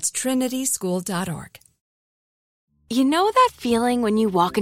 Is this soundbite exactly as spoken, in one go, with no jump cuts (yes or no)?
no